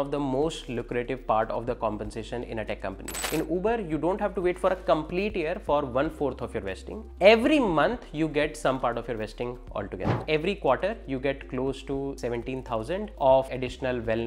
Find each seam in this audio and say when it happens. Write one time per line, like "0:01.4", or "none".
0:03.2
0:10.2
0:12.2
0:13.5